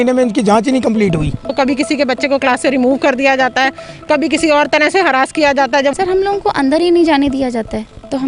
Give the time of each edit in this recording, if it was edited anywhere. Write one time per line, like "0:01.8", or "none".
0:01.5
0:05.9